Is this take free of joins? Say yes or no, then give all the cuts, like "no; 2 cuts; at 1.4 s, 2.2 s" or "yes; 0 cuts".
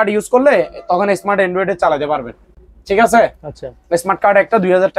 yes; 0 cuts